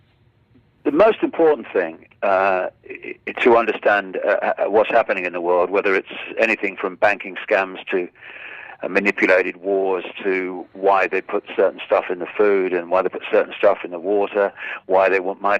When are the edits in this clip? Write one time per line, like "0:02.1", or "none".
0:11.8